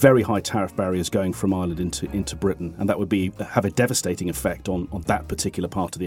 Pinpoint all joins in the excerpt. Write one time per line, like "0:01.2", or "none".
none